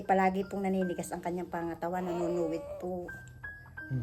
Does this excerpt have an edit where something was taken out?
no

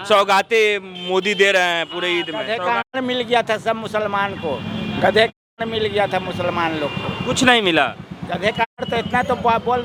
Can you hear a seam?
no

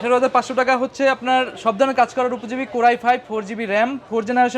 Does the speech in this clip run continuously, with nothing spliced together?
yes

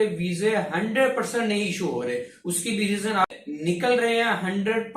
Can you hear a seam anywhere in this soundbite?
yes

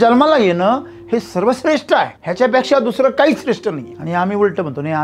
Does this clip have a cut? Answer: yes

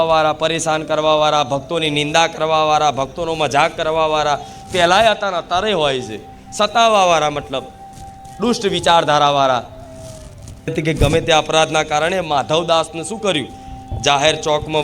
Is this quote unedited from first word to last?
no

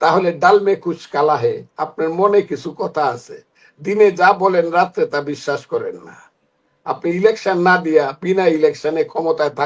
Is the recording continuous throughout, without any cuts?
yes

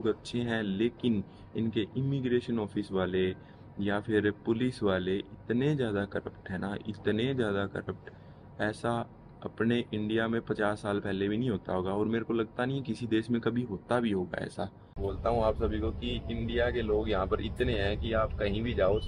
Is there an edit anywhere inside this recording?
yes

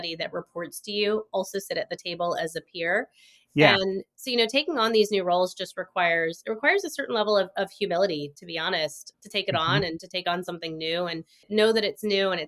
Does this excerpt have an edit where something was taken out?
yes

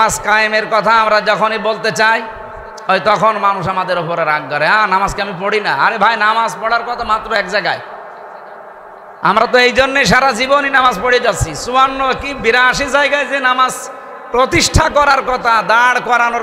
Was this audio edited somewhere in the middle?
no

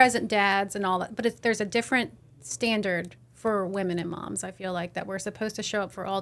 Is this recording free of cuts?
yes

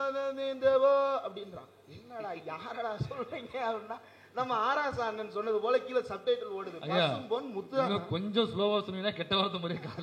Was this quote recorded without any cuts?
yes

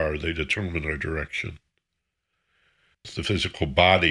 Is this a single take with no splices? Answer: no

